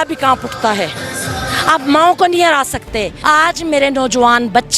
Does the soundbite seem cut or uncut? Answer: cut